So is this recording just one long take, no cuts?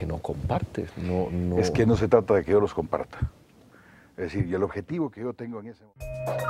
no; 1 cut; at 5.6 s

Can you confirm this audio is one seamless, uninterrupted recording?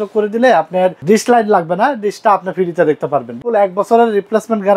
no; 2 cuts; at 1.0 s, 3.4 s

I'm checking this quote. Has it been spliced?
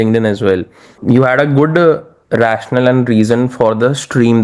yes; 1 cut; at 0.9 s

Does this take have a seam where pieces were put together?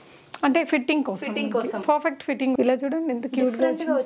yes; 1 cut; at 2.5 s

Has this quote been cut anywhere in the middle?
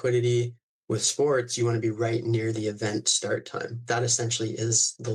no; 0 cuts

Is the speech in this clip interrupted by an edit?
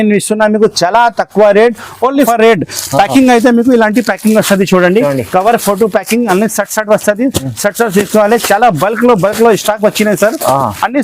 yes; 1 cut; at 2.3 s

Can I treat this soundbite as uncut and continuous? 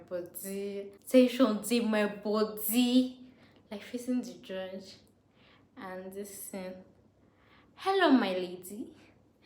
no; 1 cut; at 1.0 s

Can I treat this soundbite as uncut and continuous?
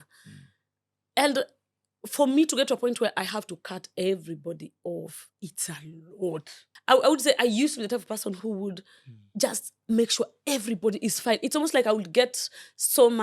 no; 1 cut; at 6.7 s

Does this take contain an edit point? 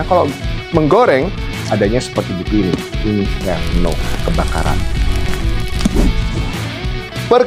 no; 0 cuts

